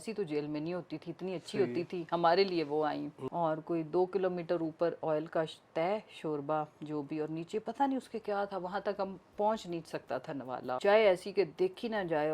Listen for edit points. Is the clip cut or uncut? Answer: cut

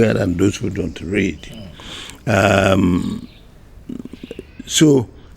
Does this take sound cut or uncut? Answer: uncut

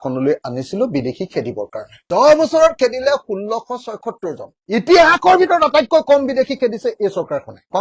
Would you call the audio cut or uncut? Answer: cut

